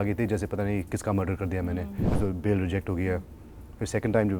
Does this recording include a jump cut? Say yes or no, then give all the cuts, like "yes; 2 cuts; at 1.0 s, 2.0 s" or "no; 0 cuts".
yes; 1 cut; at 2.0 s